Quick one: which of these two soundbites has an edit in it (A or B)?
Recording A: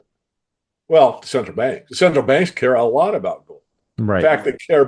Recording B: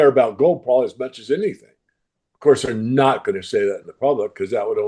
A